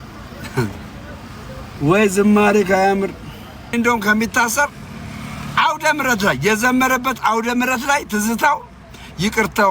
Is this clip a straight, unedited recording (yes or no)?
no